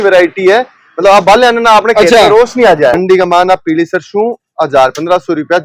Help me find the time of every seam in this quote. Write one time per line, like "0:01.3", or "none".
0:02.9